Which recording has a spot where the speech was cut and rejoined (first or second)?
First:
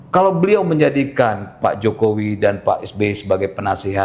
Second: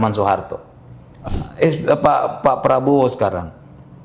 second